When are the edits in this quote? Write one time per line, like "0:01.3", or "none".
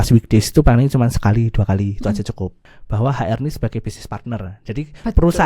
0:02.7

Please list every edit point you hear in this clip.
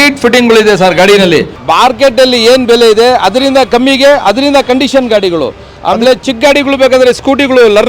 0:01.5

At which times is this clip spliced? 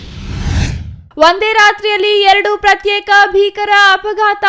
0:00.9

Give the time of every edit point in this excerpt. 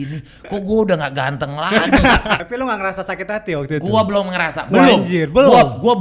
0:02.5

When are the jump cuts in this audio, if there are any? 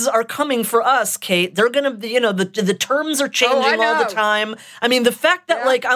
none

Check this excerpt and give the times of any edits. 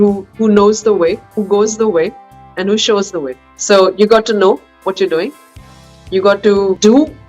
none

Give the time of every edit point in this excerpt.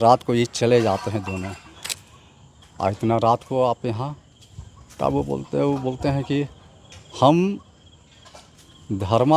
0:01.8

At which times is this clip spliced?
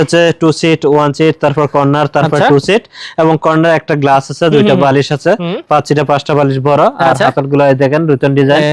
none

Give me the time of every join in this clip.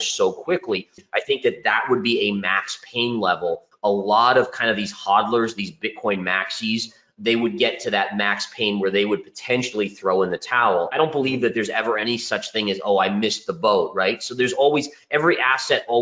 0:01.0
0:03.7
0:10.9

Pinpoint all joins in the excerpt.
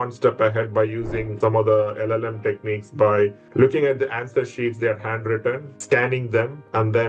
0:01.4

